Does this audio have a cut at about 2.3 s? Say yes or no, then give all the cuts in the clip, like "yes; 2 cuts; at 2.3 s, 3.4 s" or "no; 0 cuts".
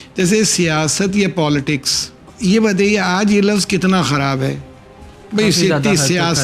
yes; 1 cut; at 2.3 s